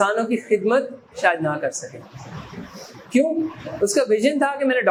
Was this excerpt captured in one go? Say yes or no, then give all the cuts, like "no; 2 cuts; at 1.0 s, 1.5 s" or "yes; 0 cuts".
yes; 0 cuts